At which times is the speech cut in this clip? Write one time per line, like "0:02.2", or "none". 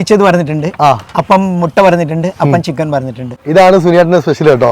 0:03.3